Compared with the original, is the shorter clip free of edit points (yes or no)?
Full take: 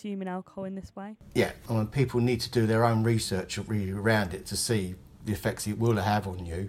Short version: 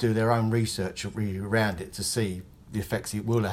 yes